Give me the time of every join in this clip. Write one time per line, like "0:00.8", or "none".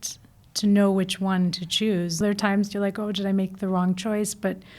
0:02.2